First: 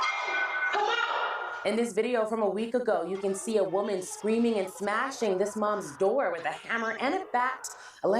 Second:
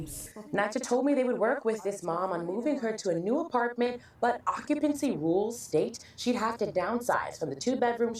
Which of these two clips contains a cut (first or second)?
first